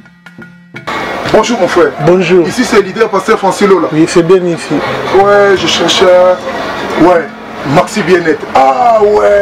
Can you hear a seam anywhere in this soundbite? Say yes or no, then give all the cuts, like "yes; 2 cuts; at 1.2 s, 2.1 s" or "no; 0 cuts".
no; 0 cuts